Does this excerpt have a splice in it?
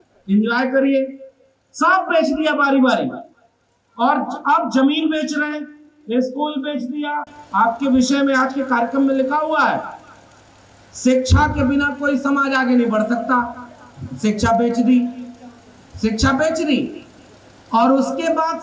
no; 0 cuts

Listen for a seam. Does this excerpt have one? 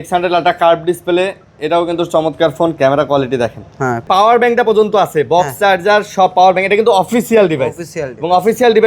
yes; 1 cut; at 4.0 s

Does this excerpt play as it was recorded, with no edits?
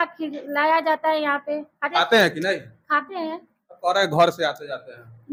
yes; 0 cuts

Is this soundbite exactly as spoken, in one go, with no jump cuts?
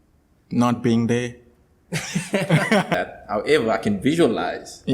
no; 1 cut; at 2.9 s

